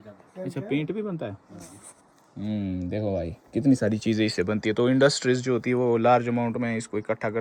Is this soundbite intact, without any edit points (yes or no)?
yes